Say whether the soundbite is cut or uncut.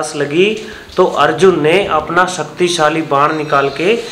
uncut